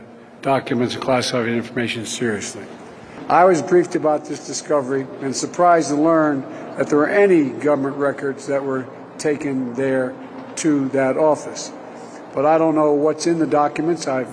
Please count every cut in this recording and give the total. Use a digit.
1